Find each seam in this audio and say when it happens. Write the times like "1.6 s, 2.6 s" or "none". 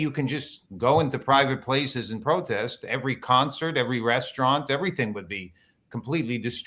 none